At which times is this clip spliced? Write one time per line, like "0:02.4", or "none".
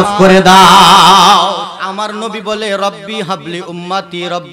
0:01.8